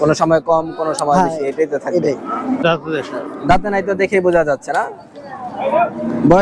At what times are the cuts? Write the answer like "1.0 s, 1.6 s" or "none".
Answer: 2.6 s